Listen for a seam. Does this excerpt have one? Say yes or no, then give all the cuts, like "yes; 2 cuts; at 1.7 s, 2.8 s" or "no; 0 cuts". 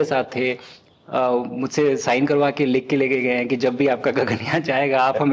no; 0 cuts